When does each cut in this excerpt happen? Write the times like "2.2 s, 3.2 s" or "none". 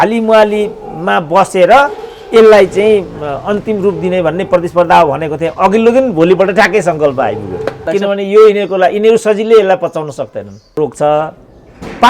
7.9 s, 10.8 s